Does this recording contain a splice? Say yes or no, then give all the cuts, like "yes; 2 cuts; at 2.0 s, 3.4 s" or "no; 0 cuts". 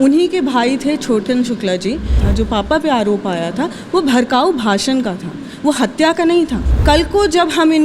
yes; 2 cuts; at 2.2 s, 6.7 s